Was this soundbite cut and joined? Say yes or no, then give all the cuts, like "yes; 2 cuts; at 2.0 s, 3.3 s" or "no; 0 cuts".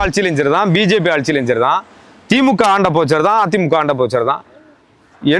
no; 0 cuts